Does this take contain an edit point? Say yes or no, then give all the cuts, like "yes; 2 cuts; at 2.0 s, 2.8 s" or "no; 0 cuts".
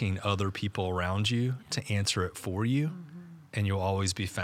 no; 0 cuts